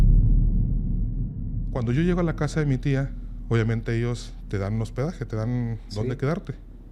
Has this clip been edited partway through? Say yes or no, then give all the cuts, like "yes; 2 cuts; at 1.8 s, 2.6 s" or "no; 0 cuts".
yes; 1 cut; at 1.7 s